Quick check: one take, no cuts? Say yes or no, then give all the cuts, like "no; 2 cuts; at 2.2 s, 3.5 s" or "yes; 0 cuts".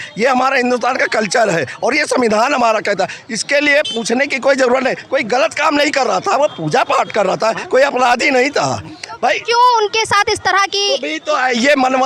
yes; 0 cuts